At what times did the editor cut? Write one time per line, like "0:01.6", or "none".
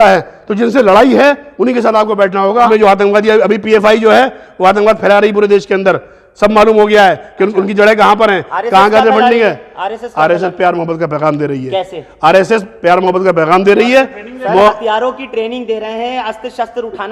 0:02.7